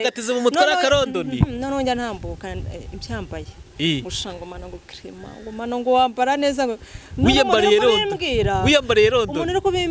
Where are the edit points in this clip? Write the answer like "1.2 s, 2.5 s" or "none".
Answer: none